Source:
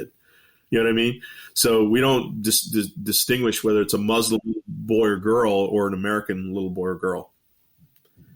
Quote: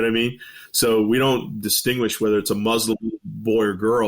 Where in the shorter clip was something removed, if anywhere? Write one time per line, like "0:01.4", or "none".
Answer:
0:01.6

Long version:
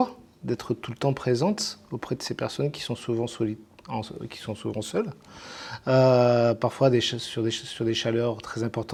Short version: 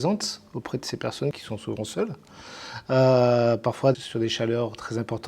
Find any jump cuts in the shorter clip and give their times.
0:01.4
0:03.9

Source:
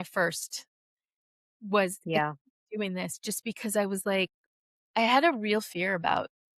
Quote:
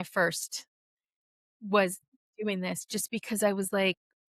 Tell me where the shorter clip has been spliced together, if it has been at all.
0:02.0

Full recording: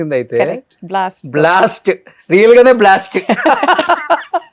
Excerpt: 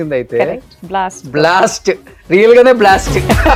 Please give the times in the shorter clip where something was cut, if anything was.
none

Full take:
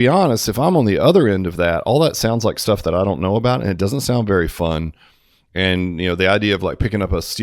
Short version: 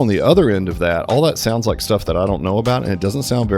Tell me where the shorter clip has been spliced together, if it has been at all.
none

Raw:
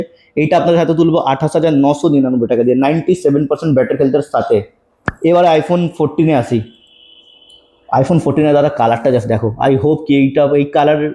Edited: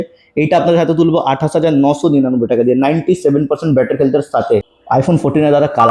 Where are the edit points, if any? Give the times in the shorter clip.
0:04.8

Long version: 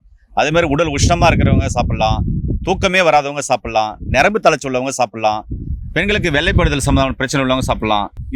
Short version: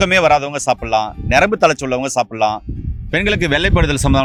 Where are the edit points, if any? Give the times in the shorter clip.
none

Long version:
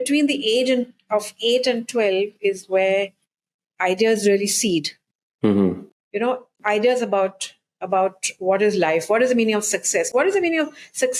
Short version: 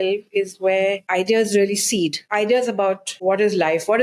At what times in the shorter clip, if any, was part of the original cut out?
0:01.0
0:02.2
0:03.1

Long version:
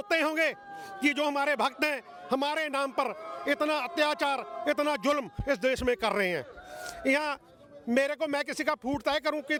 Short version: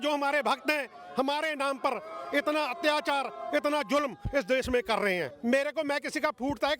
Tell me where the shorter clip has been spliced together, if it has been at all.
0:05.3

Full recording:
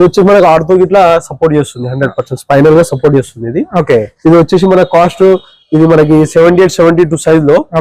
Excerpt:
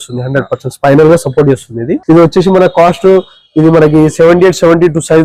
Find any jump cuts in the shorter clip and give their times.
0:02.0

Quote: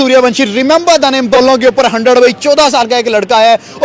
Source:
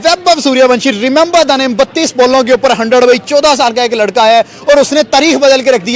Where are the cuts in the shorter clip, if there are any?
0:01.4

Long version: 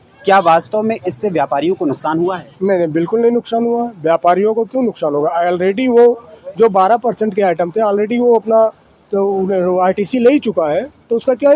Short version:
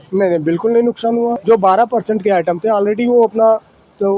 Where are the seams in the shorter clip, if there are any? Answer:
0:01.4

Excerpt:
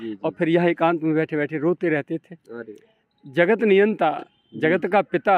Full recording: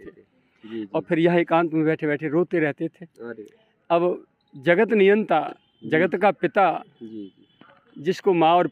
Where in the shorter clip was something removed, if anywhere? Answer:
0:03.0

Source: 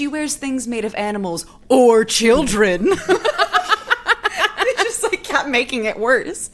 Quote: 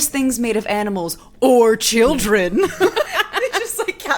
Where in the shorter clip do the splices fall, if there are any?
0:03.1

